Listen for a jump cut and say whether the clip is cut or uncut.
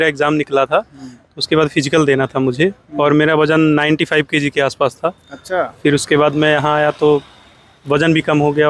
uncut